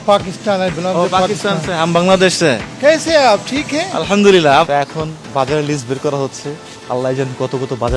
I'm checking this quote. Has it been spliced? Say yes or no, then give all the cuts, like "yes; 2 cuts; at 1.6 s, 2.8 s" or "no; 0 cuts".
yes; 1 cut; at 4.7 s